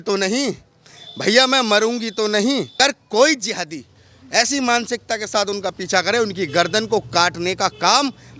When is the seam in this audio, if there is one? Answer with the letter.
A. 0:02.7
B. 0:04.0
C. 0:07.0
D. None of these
A